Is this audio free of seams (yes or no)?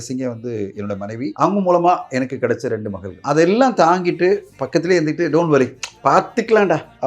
no